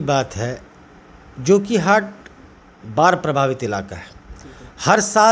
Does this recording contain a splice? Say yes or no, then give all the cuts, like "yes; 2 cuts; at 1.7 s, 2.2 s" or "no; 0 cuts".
no; 0 cuts